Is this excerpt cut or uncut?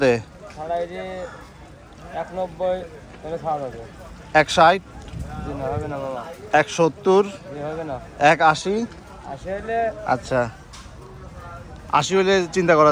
uncut